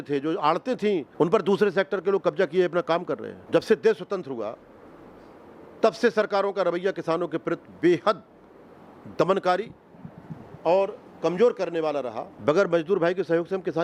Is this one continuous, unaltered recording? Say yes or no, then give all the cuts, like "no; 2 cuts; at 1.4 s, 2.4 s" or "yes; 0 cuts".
no; 3 cuts; at 1.1 s, 3.3 s, 12.2 s